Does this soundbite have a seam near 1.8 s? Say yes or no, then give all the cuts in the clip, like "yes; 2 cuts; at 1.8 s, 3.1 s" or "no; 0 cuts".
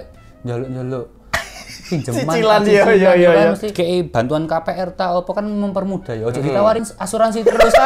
no; 2 cuts; at 3.7 s, 6.9 s